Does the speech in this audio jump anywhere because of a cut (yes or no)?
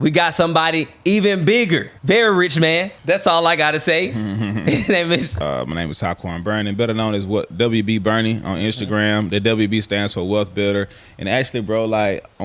yes